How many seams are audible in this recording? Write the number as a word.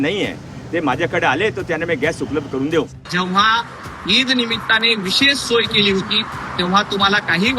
one